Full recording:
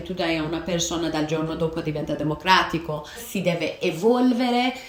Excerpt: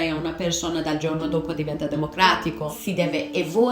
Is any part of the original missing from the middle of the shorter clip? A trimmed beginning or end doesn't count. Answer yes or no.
yes